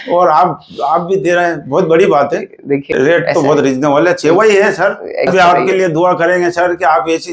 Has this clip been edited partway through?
yes; 2 cuts; at 2.7 s, 5.3 s

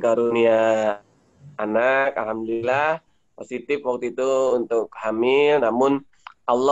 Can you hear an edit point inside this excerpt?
no; 0 cuts

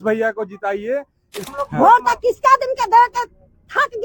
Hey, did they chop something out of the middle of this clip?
yes; 1 cut; at 1.5 s

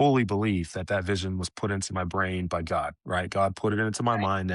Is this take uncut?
yes; 0 cuts

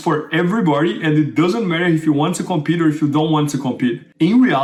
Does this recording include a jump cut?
no; 0 cuts

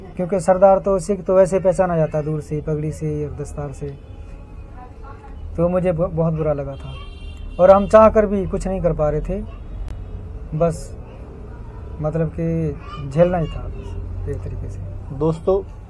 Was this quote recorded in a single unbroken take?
yes; 0 cuts

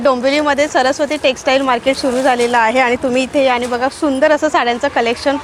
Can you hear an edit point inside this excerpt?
no; 0 cuts

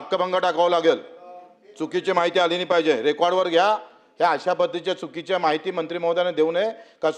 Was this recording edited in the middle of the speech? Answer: no; 0 cuts

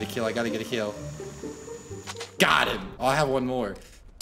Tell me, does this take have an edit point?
yes; 1 cut; at 2.9 s

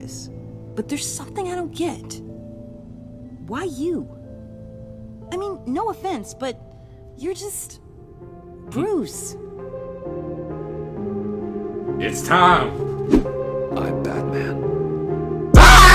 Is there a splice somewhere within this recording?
no; 0 cuts

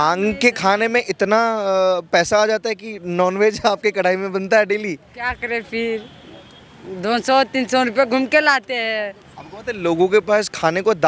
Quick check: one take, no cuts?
yes; 0 cuts

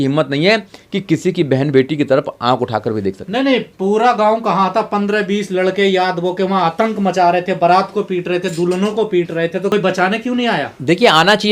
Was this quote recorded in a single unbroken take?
yes; 0 cuts

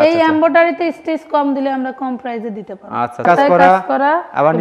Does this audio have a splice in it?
yes; 1 cut; at 3.3 s

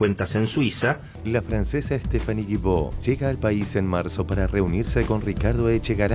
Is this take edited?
yes; 1 cut; at 1.1 s

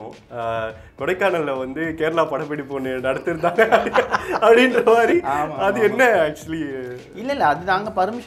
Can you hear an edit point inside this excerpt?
no; 0 cuts

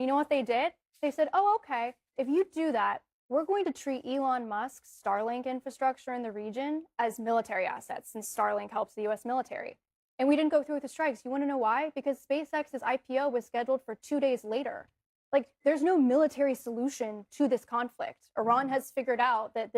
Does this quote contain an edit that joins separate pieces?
no; 0 cuts

